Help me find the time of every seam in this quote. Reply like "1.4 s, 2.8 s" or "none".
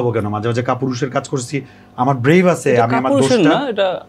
none